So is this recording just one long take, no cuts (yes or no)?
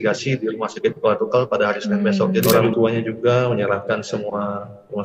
no